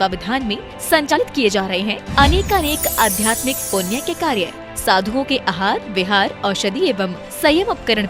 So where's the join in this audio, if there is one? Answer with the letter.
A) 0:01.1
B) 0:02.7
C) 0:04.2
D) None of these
A